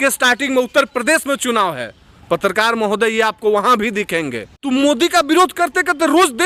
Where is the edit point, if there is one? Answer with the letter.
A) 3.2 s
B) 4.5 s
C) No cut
B